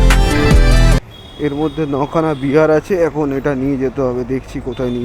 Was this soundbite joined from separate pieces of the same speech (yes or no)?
yes